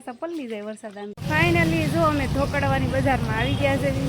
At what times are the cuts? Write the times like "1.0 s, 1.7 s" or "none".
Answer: 1.2 s